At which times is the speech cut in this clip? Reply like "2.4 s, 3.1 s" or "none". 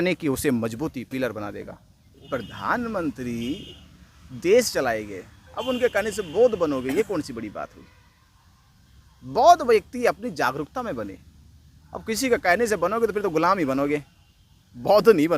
2.2 s